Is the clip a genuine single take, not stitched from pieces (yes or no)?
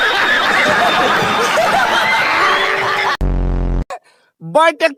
yes